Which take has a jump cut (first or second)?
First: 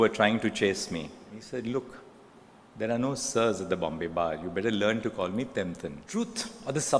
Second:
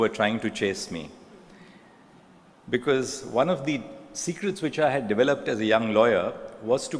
first